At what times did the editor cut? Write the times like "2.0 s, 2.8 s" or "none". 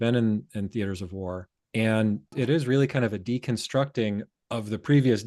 1.5 s, 2.3 s, 4.4 s